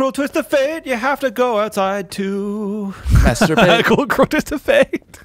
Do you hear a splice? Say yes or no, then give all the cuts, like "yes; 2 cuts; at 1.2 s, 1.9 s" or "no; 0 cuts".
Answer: no; 0 cuts